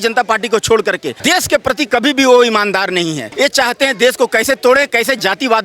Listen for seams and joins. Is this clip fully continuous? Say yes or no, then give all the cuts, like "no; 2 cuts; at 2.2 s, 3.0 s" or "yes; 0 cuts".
no; 2 cuts; at 1.1 s, 3.2 s